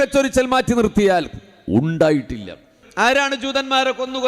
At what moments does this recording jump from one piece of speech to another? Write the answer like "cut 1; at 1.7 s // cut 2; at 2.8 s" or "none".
cut 1; at 2.8 s